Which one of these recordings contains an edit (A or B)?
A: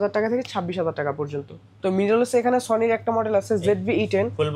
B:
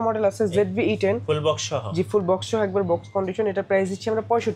A